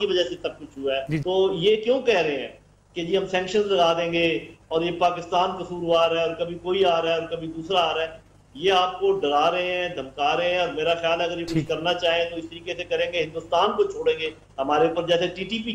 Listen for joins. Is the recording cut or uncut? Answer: uncut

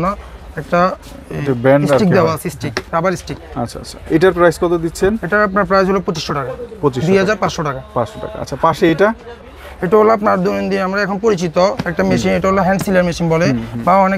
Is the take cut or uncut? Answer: uncut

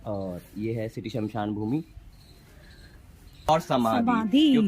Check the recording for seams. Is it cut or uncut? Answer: cut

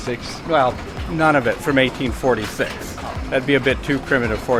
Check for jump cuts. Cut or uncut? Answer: uncut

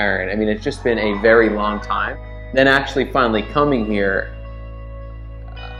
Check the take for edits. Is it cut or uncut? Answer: uncut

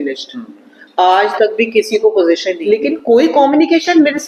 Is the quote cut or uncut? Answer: cut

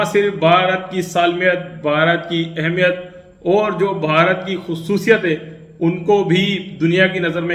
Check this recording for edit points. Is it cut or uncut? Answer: uncut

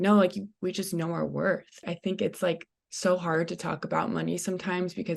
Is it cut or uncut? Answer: cut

